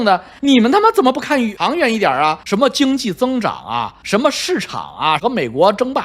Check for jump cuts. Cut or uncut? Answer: cut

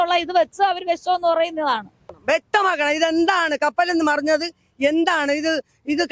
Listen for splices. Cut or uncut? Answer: cut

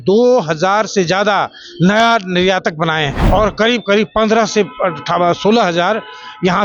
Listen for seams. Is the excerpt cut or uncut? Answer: cut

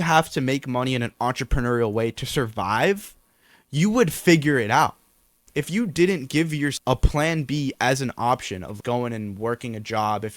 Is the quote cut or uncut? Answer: cut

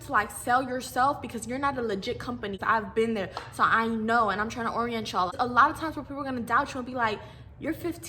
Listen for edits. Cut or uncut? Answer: cut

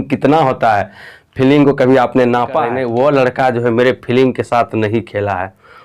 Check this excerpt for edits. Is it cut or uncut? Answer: cut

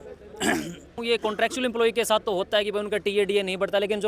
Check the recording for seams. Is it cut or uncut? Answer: cut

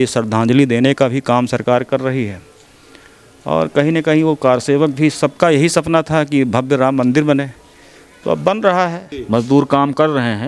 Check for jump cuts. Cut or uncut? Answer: cut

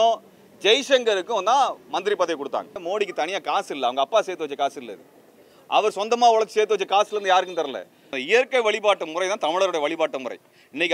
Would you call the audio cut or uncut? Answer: cut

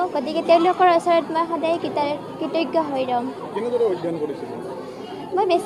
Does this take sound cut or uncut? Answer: uncut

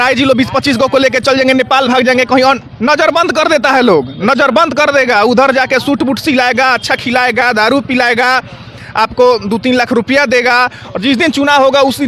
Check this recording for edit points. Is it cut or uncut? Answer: uncut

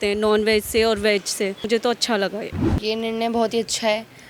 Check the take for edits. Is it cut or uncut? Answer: cut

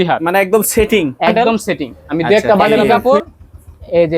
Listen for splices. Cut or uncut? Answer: cut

